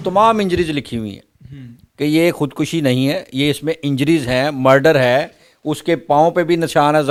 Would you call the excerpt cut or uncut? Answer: uncut